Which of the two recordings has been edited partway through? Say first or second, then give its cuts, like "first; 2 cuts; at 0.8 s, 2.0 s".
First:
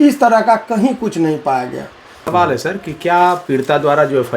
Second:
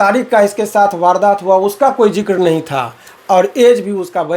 first; 1 cut; at 2.2 s